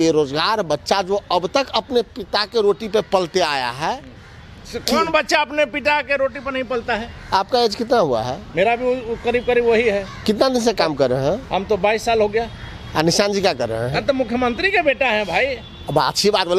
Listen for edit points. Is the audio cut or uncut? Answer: uncut